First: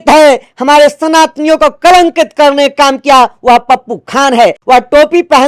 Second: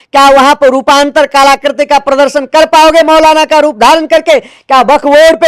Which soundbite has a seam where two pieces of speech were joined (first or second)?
first